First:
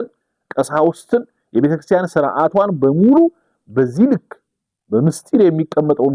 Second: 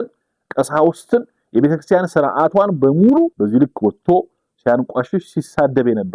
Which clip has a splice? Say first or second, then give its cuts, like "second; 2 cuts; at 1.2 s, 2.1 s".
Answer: second; 1 cut; at 3.3 s